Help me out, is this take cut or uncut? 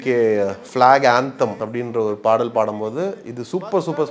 cut